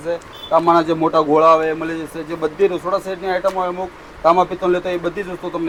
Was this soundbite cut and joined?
no; 0 cuts

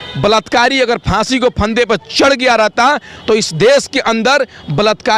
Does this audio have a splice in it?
no; 0 cuts

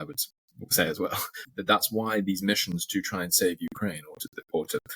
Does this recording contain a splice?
yes; 1 cut; at 1.4 s

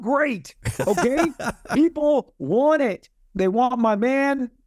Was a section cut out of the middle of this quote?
yes; 1 cut; at 3.1 s

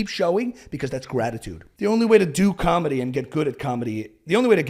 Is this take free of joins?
no; 1 cut; at 1.6 s

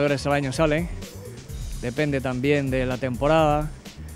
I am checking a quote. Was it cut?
no; 0 cuts

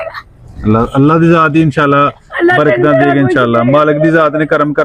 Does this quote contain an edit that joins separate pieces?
no; 0 cuts

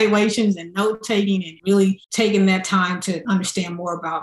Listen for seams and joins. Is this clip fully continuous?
no; 3 cuts; at 1.5 s, 2.0 s, 3.2 s

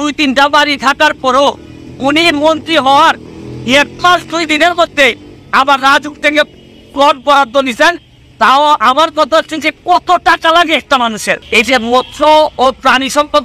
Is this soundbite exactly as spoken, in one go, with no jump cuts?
no; 1 cut; at 11.4 s

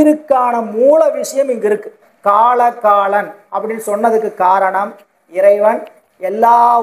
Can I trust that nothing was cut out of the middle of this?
no; 1 cut; at 2.1 s

